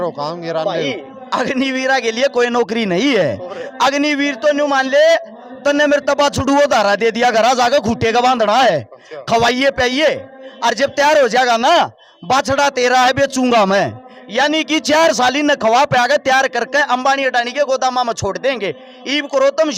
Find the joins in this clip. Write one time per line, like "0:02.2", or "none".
none